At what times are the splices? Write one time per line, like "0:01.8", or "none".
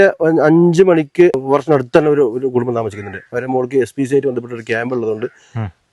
0:01.4